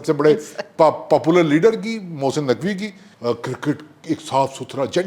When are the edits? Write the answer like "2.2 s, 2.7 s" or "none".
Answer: 3.0 s